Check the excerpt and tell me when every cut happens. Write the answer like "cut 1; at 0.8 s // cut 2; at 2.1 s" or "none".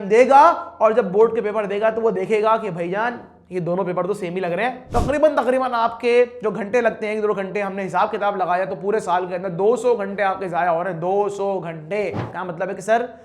cut 1; at 4.8 s // cut 2; at 12.3 s